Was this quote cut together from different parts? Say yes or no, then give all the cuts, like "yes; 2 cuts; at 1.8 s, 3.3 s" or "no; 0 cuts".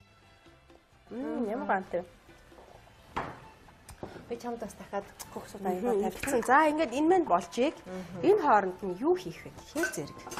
no; 0 cuts